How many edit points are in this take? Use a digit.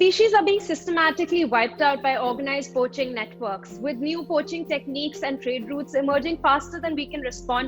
0